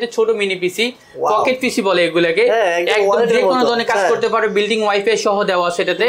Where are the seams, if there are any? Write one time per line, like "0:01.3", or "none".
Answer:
none